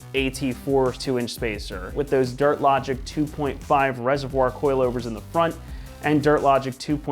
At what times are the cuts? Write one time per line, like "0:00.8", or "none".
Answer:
0:01.0

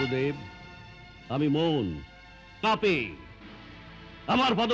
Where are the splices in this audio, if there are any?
0:02.6

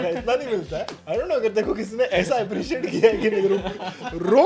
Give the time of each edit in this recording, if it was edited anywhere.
0:01.0

